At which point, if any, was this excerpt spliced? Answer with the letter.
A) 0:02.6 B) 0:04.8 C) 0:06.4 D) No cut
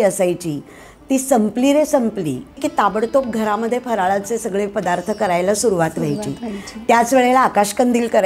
A